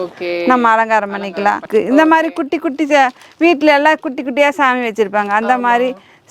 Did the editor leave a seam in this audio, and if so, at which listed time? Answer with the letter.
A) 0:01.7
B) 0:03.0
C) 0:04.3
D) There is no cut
A